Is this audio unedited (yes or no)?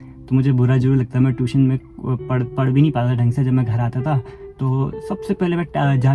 yes